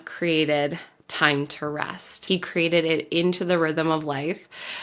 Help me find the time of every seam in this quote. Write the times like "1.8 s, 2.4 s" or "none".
2.1 s